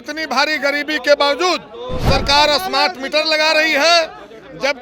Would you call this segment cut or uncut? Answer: uncut